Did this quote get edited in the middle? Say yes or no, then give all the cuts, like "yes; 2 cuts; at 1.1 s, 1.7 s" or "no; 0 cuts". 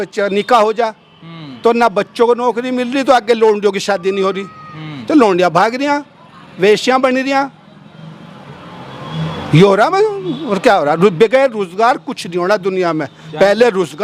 no; 0 cuts